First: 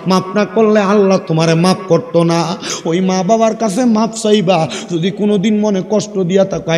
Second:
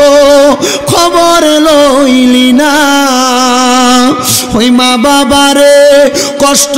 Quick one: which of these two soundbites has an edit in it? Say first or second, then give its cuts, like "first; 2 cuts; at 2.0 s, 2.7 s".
first; 1 cut; at 2.7 s